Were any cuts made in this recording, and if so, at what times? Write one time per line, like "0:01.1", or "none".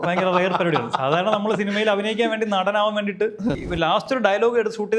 0:03.7